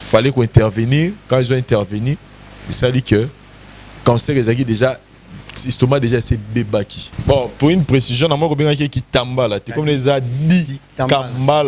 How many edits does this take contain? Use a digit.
1